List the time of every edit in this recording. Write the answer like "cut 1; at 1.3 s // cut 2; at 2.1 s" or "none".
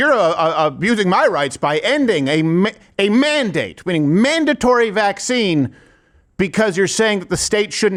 none